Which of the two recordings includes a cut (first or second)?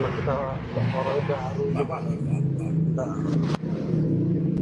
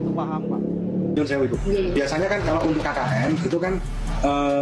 second